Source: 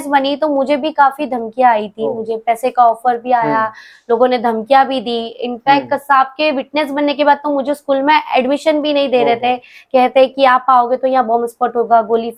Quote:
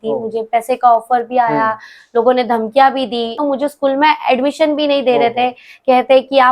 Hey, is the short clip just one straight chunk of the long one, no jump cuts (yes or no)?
no